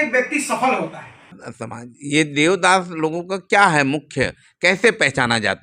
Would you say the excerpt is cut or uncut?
cut